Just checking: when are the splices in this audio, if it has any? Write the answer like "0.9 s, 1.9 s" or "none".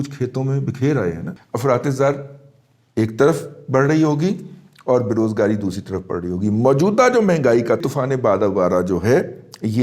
1.3 s, 7.8 s